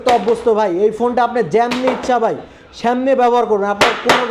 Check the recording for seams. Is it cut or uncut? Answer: uncut